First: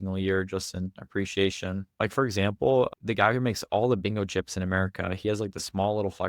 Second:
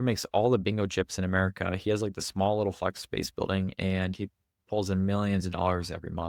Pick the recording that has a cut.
first; 1 cut; at 1.9 s

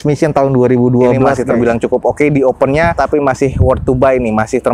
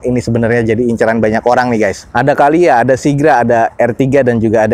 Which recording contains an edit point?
first; 2 cuts; at 1.4 s, 2.9 s

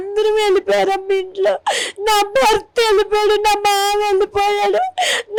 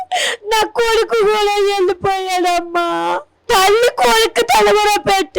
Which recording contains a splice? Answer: second; 1 cut; at 3.3 s

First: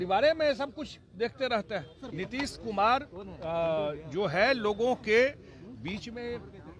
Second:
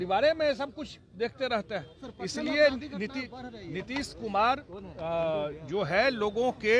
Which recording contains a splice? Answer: first; 1 cut; at 2.0 s

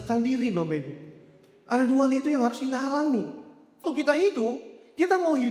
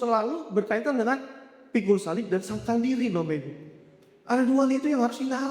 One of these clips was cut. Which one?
first; 1 cut; at 3.8 s

